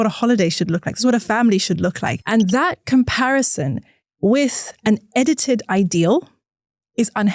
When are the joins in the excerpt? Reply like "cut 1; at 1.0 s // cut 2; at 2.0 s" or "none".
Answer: cut 1; at 2.1 s